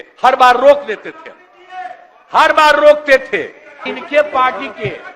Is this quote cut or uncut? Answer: cut